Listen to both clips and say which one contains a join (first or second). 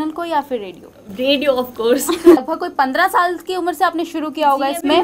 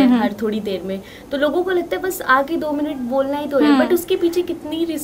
first